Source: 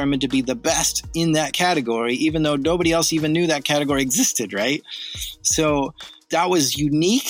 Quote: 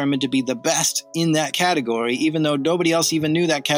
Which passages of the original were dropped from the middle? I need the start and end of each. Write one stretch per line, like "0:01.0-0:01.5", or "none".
none